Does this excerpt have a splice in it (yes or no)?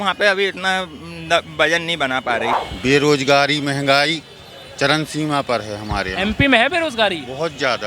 yes